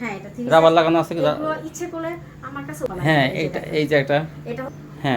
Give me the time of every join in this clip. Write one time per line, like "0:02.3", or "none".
0:02.9